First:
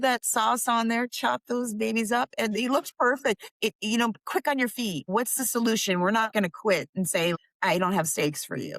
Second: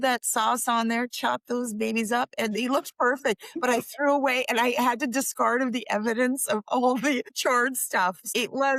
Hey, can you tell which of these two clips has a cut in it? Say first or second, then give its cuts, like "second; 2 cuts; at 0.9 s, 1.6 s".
first; 4 cuts; at 3.5 s, 5.0 s, 6.3 s, 7.3 s